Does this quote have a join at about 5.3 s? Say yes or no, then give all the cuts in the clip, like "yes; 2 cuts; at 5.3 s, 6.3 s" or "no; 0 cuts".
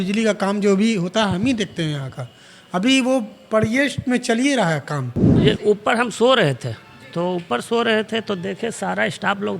yes; 1 cut; at 5.3 s